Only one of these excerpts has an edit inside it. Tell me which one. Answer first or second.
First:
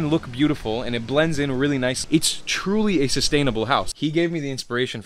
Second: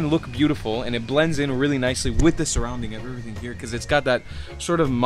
first